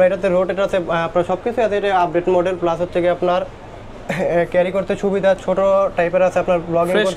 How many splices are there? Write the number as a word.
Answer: zero